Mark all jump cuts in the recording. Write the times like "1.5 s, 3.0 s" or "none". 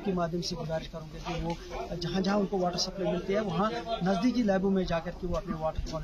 none